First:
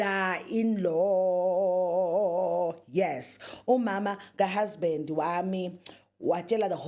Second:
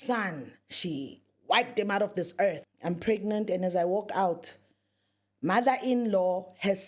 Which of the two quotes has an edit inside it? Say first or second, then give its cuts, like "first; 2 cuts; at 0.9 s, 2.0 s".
second; 1 cut; at 2.7 s